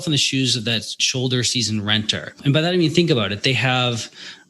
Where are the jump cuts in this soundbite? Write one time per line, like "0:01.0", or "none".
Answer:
0:01.0
0:02.4